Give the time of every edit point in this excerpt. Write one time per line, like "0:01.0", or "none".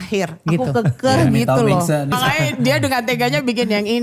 0:02.1